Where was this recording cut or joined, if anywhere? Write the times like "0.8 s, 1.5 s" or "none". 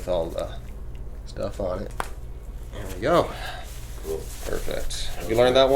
1.9 s